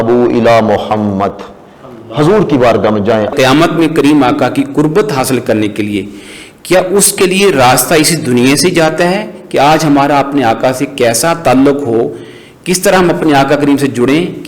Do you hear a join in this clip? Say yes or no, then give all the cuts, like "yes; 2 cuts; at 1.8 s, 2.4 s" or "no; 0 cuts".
yes; 1 cut; at 3.3 s